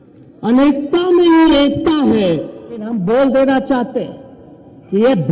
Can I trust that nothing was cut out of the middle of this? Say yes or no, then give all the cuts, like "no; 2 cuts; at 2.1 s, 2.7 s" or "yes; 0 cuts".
no; 1 cut; at 2.9 s